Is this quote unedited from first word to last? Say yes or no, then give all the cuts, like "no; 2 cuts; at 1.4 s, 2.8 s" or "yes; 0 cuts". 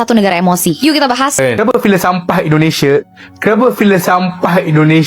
no; 1 cut; at 1.4 s